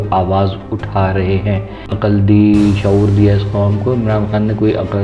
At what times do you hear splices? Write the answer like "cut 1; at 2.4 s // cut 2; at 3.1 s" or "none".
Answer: cut 1; at 1.9 s